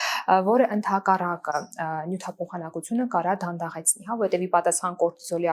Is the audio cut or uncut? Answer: uncut